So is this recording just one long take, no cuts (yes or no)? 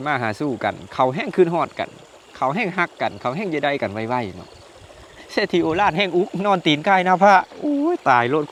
yes